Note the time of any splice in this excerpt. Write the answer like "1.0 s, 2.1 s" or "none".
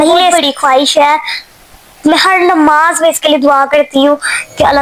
none